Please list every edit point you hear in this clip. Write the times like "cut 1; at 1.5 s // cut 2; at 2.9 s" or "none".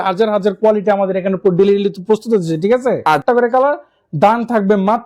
cut 1; at 3.2 s